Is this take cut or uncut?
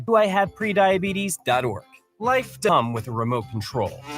cut